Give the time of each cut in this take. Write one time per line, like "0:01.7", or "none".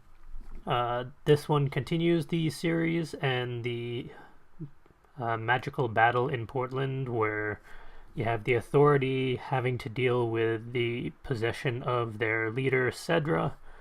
0:10.6